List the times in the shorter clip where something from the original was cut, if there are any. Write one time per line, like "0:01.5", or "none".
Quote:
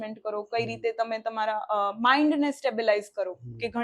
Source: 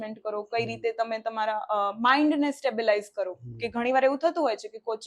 none